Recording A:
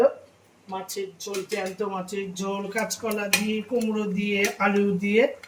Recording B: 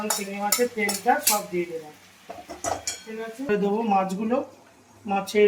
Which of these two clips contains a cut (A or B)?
B